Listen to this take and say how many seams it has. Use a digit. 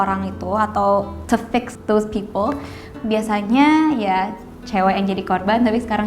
1